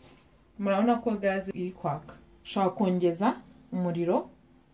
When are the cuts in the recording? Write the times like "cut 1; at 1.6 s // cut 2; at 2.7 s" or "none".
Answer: cut 1; at 1.5 s